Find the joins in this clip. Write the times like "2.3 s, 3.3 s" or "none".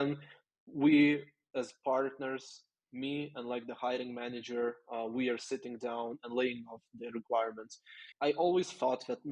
8.0 s